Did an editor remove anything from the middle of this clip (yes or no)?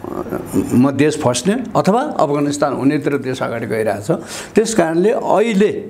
no